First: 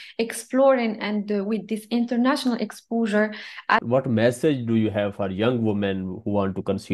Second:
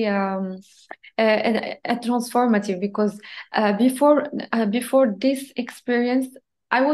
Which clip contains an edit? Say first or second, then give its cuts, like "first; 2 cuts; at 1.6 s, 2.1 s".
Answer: first; 1 cut; at 3.8 s